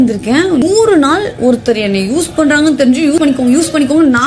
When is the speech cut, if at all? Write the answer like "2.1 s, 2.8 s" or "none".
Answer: none